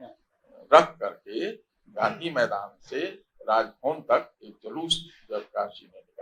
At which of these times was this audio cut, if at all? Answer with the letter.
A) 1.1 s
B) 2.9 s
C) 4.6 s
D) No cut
D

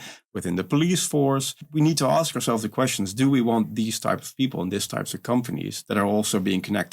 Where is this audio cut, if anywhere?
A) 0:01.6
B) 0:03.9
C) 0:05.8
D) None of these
A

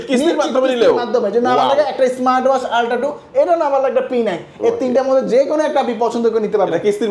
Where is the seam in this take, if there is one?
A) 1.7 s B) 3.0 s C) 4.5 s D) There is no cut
D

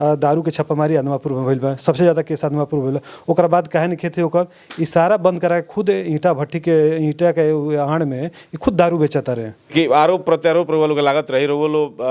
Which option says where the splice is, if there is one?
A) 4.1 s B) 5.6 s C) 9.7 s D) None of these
C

